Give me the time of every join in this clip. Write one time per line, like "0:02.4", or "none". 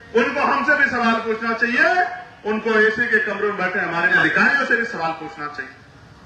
0:04.2